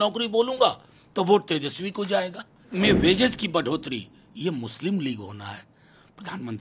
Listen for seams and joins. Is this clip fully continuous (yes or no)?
no